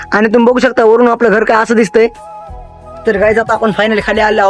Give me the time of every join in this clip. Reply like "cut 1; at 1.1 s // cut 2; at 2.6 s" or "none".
none